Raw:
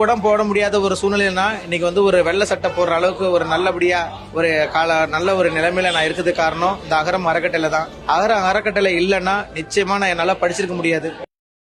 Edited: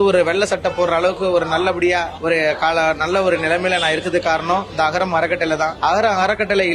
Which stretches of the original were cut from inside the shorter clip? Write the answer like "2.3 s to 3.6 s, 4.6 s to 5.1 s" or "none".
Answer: 4.1 s to 4.3 s, 7.9 s to 8.0 s